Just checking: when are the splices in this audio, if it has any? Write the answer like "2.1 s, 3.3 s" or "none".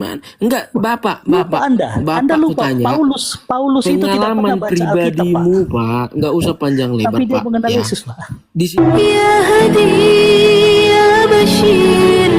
8.7 s

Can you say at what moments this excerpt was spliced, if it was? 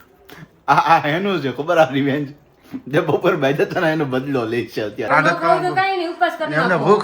5.0 s

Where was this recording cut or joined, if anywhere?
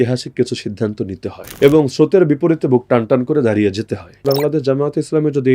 1.4 s, 4.2 s

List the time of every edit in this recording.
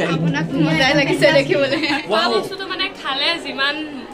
2.0 s

